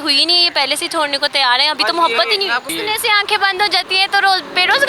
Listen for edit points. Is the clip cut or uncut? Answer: cut